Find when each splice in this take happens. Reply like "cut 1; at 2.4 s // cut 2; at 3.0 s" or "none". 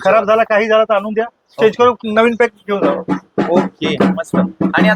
none